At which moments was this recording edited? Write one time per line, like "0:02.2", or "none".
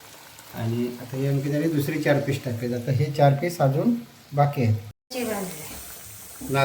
0:04.9